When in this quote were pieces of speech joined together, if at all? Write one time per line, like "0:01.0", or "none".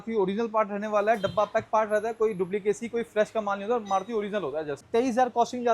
0:04.8